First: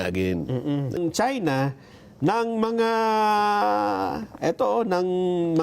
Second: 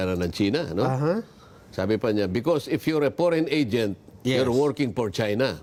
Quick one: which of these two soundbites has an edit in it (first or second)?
first